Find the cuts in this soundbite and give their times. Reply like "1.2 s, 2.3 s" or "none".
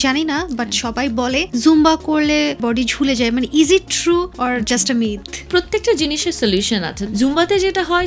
1.5 s, 2.6 s, 4.3 s, 5.5 s, 7.0 s